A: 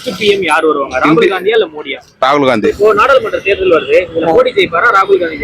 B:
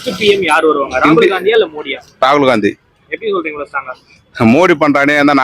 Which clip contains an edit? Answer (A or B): A